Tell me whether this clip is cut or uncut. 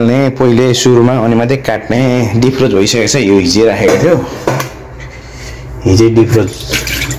uncut